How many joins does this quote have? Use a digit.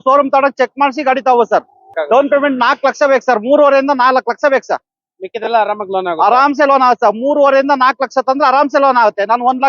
1